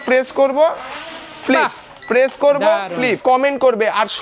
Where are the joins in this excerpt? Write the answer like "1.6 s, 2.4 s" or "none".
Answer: 3.2 s